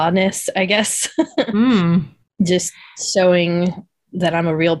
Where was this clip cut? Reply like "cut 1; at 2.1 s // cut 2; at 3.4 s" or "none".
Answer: cut 1; at 2.2 s